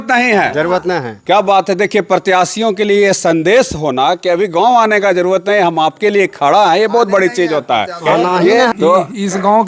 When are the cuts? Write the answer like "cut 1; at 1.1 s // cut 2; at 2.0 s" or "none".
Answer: cut 1; at 8.7 s